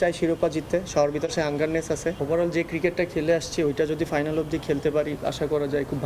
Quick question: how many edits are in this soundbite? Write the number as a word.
one